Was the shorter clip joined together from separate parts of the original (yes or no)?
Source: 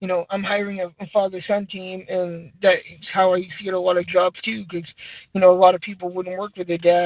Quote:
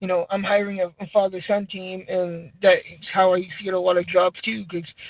no